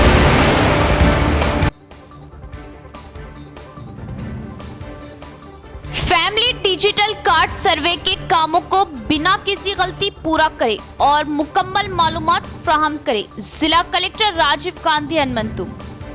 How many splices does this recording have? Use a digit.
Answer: 1